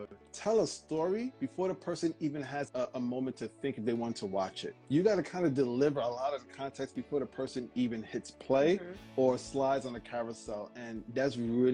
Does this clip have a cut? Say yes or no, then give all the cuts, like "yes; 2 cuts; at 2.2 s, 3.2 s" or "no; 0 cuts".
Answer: no; 0 cuts